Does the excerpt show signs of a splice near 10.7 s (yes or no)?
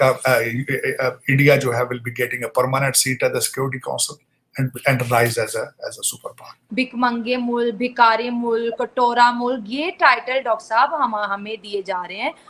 no